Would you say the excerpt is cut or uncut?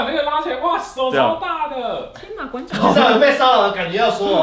uncut